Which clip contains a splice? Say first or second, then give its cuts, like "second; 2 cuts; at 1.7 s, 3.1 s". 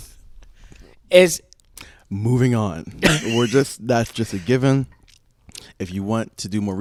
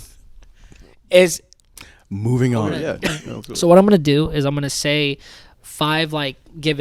second; 1 cut; at 2.8 s